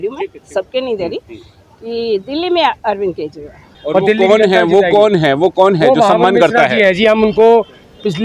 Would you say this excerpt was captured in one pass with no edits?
no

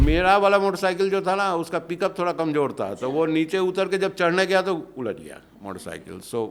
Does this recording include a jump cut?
no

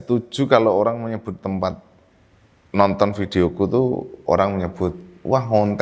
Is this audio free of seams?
yes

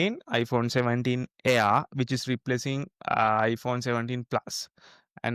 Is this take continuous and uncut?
yes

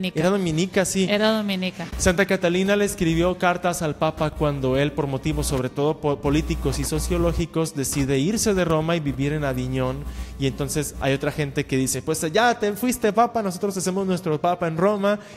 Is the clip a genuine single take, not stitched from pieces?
yes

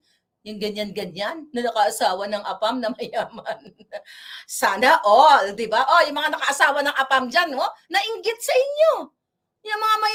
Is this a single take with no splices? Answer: yes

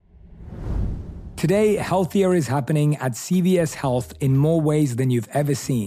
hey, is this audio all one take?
no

